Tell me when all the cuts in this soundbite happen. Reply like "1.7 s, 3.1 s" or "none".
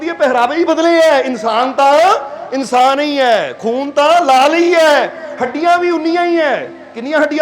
none